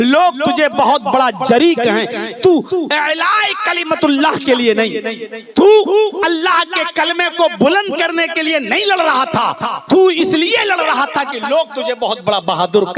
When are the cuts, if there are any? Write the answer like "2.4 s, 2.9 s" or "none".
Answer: none